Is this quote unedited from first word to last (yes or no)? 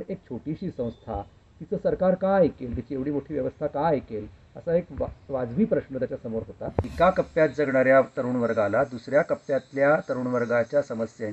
no